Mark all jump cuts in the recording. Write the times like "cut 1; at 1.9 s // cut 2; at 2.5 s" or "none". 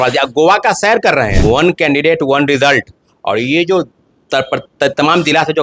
cut 1; at 1.3 s